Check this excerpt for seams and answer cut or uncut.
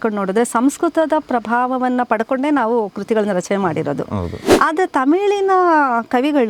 cut